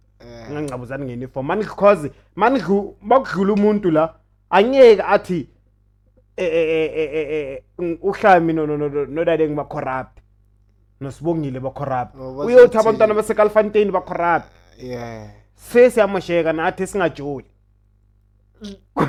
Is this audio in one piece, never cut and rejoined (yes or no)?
yes